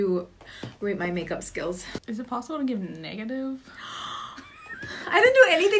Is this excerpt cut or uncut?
uncut